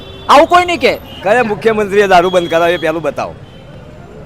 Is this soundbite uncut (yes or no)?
no